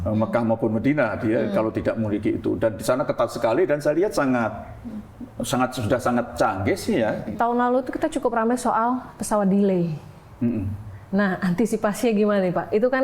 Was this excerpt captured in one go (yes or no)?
no